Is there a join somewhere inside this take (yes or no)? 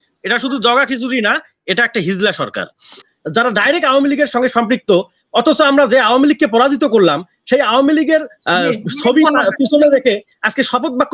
yes